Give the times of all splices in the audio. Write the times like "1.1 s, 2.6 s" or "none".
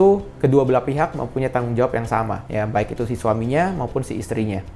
none